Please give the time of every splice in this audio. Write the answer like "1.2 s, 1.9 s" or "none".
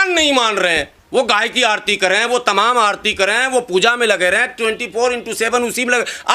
1.0 s